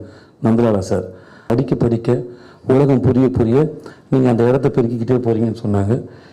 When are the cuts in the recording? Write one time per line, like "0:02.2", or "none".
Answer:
0:01.5